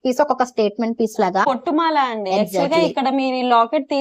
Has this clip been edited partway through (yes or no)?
yes